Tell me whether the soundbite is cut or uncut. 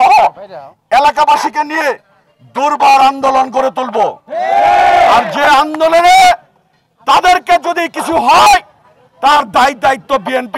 uncut